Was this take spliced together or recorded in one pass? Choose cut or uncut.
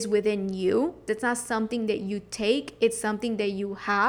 cut